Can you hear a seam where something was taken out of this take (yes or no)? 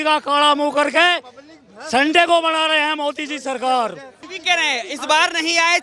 yes